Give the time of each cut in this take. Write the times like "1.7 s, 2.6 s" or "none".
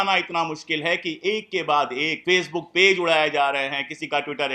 2.1 s